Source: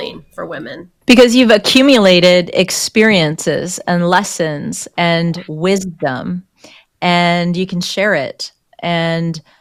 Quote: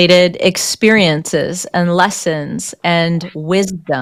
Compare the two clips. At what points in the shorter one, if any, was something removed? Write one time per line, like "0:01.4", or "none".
none